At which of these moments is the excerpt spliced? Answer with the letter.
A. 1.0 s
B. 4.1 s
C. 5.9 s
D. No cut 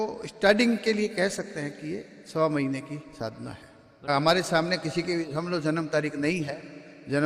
B